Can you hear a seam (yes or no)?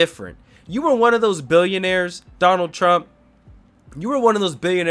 no